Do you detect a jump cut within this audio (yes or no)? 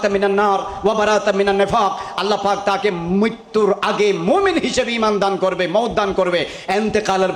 no